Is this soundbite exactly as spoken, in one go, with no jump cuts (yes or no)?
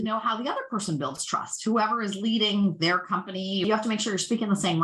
no